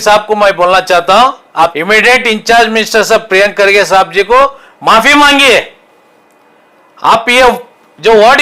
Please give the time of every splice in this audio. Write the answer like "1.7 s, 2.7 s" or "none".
1.7 s